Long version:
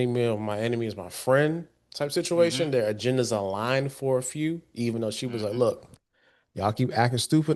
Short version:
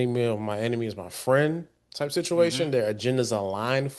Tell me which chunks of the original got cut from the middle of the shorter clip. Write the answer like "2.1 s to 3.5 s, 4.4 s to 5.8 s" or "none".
none

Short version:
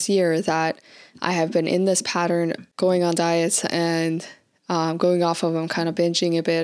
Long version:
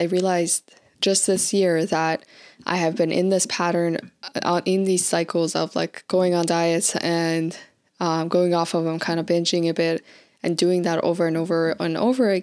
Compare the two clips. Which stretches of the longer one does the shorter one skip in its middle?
4.1 s to 6.0 s

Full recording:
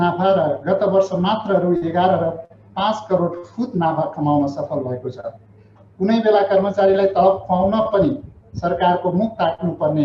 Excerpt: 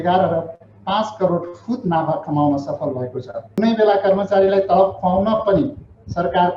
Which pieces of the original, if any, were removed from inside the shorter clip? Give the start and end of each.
5.5 s to 6.0 s

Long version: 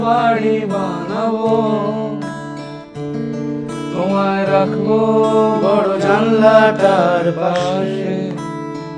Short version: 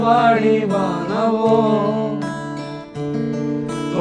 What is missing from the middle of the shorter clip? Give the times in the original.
none

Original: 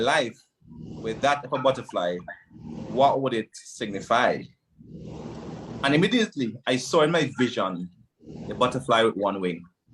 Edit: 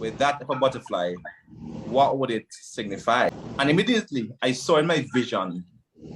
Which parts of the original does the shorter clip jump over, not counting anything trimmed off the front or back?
4.4 s to 5.6 s

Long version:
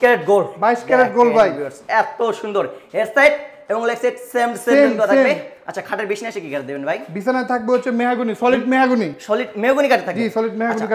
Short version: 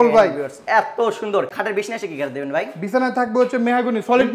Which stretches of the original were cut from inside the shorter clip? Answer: 2.8 s to 5.9 s

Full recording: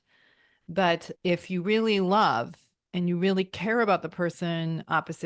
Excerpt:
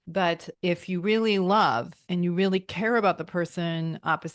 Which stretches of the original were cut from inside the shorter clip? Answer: 2.6 s to 2.8 s

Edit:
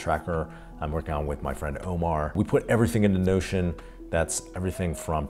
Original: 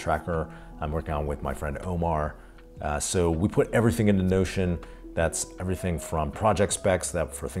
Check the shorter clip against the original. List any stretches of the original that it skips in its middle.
2.3 s to 3.4 s

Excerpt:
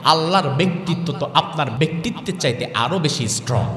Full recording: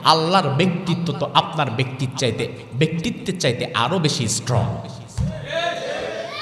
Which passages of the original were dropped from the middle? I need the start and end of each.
1.7 s to 2.7 s

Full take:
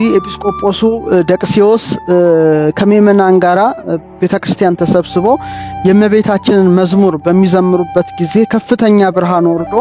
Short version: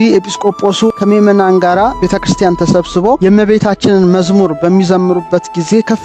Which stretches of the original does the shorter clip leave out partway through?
1.0 s to 2.8 s, 3.7 s to 4.1 s, 5.4 s to 5.8 s

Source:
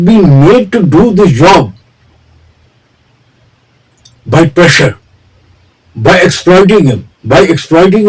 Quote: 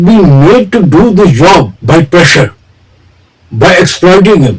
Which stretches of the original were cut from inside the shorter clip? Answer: 1.8 s to 4.2 s

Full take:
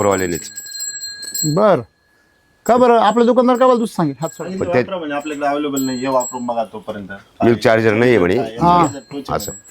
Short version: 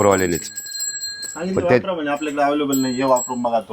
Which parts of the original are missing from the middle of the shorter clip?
1.3 s to 4.3 s

